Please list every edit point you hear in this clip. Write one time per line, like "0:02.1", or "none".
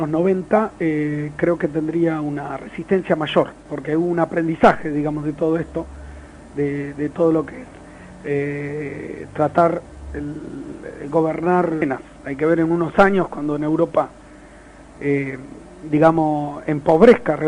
none